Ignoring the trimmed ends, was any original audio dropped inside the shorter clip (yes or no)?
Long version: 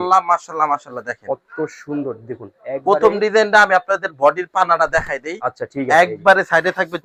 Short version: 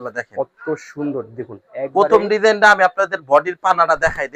no